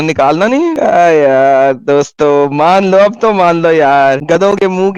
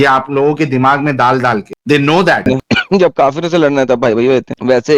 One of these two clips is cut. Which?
second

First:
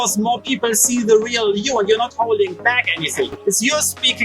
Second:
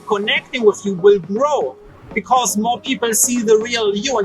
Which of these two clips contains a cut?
first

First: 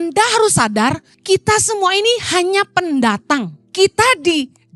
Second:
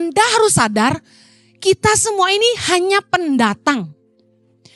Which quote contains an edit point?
first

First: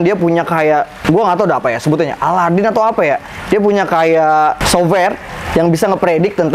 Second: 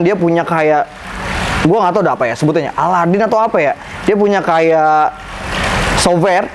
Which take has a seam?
first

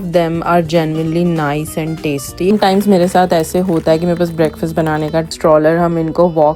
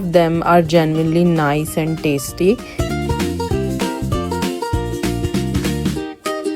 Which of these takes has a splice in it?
first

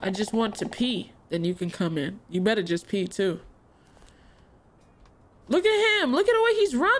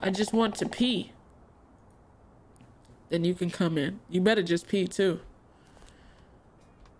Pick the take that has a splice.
first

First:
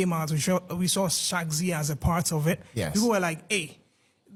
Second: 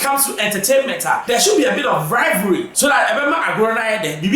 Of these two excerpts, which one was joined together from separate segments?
second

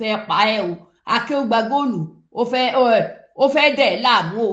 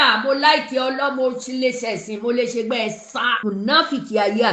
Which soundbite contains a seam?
second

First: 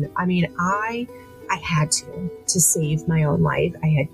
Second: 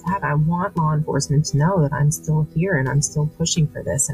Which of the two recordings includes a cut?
first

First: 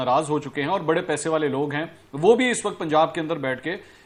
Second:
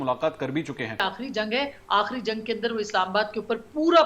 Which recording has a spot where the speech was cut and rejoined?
second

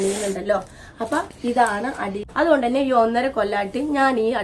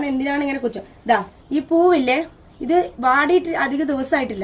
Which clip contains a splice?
first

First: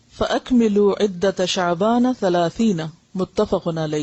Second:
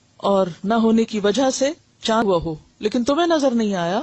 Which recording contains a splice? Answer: second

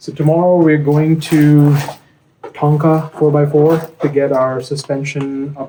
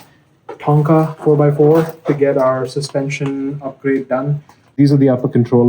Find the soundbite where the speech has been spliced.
second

